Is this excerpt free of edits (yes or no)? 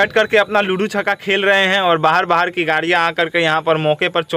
yes